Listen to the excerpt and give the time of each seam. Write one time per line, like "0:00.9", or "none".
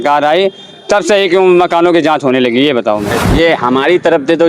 0:03.2